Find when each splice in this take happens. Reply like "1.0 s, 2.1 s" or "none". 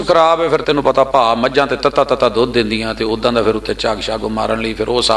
none